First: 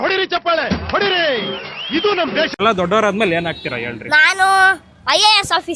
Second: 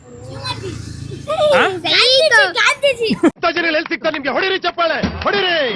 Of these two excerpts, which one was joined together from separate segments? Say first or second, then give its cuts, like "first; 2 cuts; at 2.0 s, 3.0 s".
first; 1 cut; at 2.6 s